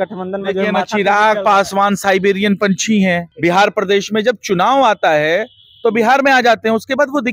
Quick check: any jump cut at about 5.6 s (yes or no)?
no